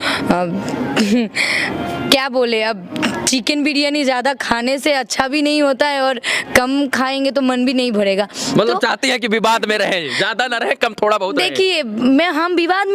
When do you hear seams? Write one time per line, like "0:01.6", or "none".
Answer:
none